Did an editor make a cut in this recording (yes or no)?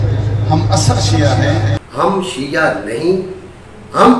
yes